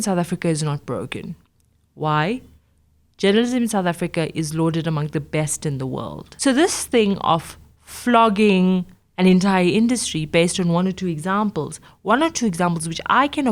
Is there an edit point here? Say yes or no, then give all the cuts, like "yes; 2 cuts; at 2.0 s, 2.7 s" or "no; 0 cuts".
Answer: yes; 1 cut; at 6.2 s